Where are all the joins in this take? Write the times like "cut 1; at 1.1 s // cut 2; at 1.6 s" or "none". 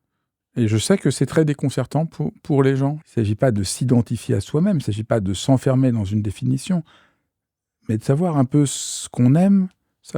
cut 1; at 3.0 s